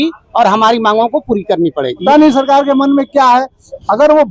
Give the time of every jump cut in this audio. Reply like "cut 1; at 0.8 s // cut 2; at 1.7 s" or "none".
cut 1; at 1.9 s